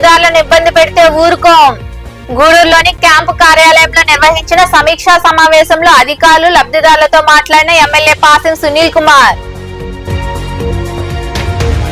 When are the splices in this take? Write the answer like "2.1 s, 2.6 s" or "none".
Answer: none